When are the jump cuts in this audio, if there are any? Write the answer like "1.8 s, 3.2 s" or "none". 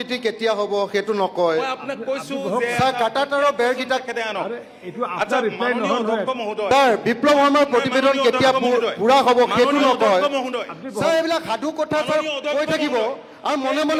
none

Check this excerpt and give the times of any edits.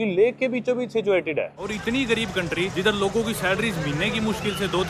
1.6 s, 2.7 s

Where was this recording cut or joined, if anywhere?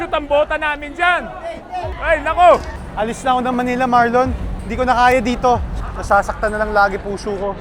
2.0 s, 2.7 s

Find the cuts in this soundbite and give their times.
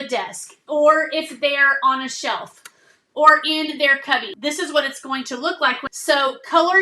4.3 s, 5.9 s

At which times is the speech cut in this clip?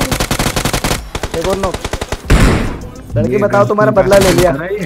2.3 s

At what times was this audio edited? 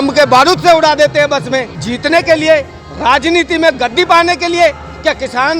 1.9 s

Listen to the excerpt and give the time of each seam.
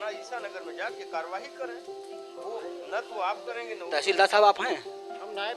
none

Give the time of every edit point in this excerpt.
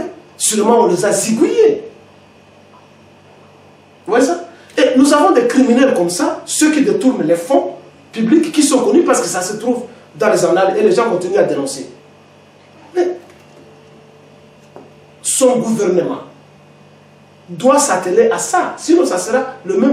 none

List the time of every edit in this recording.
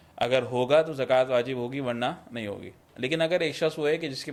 none

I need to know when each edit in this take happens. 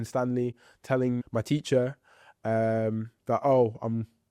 1.2 s

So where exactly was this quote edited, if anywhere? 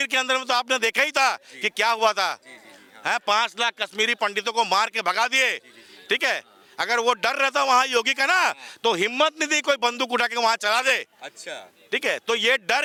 none

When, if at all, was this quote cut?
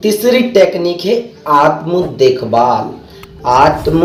none

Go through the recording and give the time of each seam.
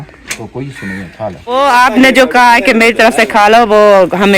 1.6 s

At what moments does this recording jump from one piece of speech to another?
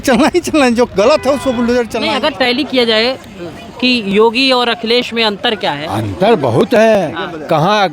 2.0 s

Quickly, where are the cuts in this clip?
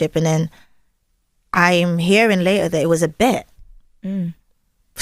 none

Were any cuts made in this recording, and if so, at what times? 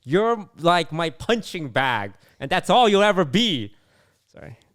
none

